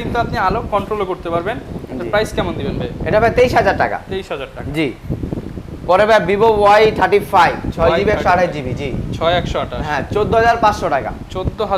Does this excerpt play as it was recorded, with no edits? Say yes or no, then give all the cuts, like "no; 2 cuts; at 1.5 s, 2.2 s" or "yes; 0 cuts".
yes; 0 cuts